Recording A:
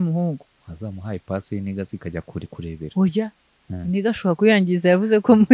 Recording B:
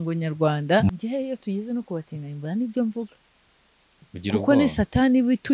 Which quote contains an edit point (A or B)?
B